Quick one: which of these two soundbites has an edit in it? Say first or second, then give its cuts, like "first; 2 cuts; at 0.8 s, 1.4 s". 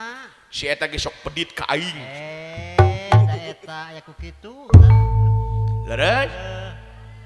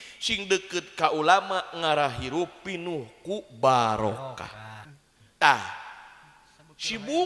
second; 1 cut; at 4.9 s